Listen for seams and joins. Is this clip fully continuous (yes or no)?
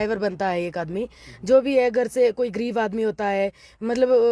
yes